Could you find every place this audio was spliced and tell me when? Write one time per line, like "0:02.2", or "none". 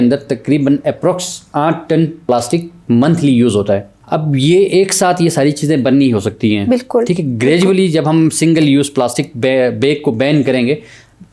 0:02.2
0:03.9